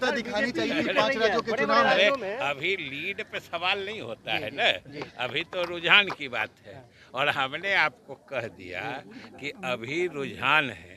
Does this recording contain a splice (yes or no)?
no